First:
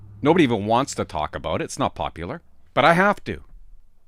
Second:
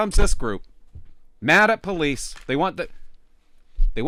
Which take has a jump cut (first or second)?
first